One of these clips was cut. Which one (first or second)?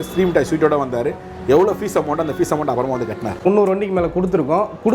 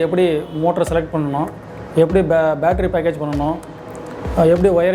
first